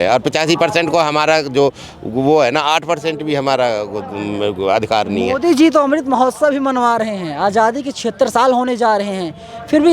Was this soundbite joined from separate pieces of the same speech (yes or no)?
no